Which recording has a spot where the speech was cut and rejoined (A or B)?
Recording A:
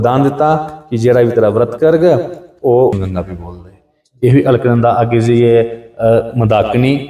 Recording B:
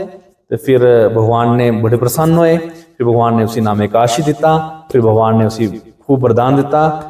A